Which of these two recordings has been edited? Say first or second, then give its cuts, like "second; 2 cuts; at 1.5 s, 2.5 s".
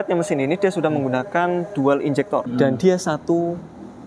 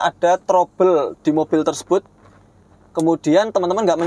first; 1 cut; at 2.5 s